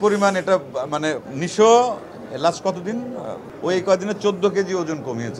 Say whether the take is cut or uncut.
cut